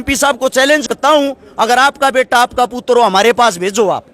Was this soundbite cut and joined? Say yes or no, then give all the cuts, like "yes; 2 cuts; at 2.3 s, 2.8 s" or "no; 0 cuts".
yes; 1 cut; at 0.9 s